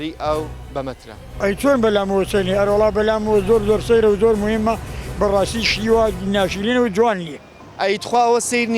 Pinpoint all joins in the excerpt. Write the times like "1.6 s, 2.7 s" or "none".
7.6 s